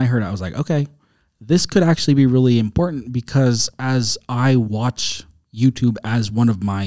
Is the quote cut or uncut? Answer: uncut